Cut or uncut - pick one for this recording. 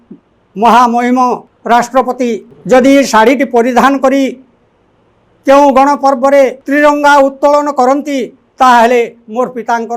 cut